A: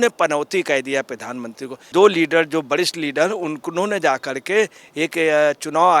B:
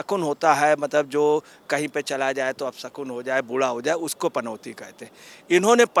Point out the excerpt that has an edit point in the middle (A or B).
A